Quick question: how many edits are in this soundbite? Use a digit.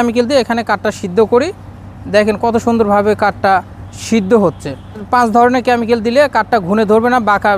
1